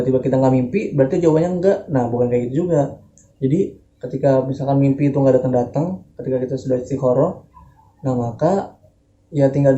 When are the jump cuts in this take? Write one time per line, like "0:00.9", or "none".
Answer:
none